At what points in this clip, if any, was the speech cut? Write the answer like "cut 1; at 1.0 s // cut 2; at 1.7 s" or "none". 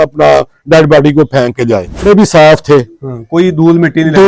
cut 1; at 2.0 s